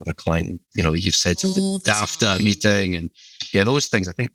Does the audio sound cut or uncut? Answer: uncut